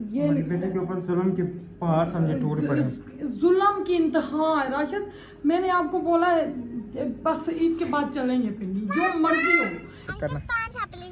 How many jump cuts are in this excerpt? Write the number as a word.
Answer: one